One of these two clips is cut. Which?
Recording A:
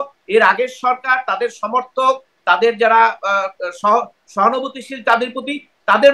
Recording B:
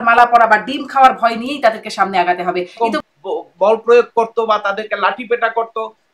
B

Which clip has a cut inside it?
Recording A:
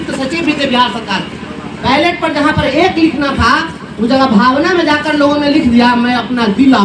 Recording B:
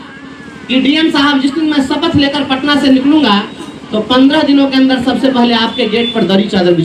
A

